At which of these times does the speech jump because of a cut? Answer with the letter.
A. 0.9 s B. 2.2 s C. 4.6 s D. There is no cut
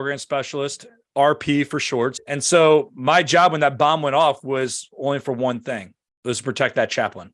B